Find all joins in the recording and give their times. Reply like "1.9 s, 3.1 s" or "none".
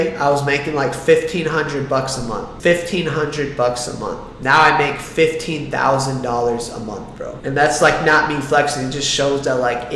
none